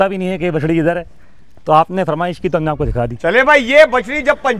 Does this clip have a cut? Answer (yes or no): no